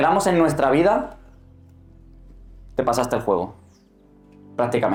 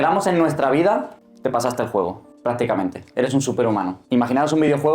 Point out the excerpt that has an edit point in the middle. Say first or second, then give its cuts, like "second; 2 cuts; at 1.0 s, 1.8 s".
second; 3 cuts; at 1.2 s, 2.3 s, 4.0 s